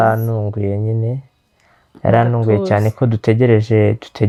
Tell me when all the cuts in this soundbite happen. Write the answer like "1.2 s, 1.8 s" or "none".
none